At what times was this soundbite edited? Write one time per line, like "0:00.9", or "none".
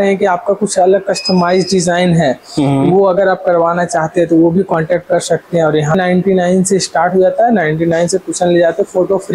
0:05.9